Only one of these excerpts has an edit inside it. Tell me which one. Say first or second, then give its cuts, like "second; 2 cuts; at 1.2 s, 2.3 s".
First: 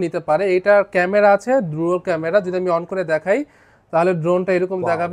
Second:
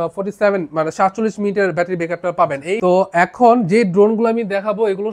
second; 2 cuts; at 2.8 s, 3.6 s